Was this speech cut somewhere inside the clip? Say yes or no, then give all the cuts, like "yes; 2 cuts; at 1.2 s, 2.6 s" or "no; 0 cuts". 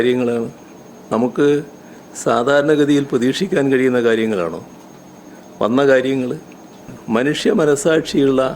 yes; 1 cut; at 7.0 s